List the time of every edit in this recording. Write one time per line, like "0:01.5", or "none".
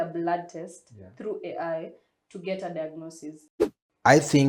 0:03.5